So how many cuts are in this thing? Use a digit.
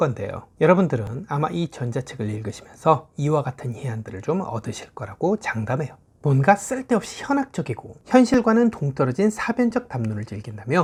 0